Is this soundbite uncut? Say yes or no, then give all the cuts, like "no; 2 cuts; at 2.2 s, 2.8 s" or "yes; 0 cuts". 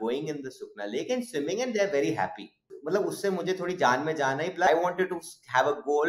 no; 2 cuts; at 2.7 s, 4.7 s